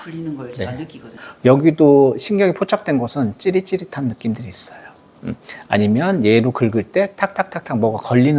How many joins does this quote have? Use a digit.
1